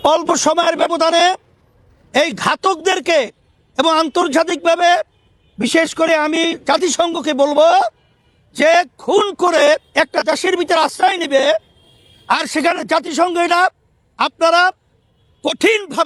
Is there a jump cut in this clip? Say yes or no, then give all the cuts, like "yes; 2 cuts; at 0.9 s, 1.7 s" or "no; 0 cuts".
no; 0 cuts